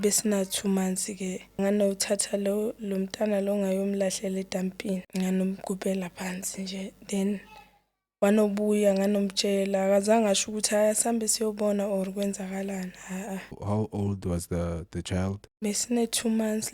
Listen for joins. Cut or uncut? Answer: cut